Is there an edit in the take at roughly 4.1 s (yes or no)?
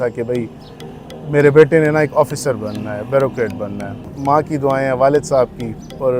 yes